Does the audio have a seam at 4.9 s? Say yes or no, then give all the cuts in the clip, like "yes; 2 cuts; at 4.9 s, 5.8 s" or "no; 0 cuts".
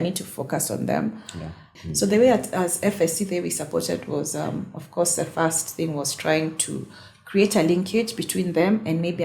no; 1 cut; at 1.7 s